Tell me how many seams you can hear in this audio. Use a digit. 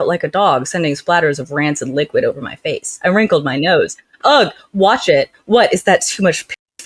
0